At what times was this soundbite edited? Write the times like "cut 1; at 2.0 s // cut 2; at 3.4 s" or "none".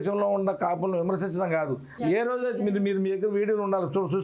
cut 1; at 1.9 s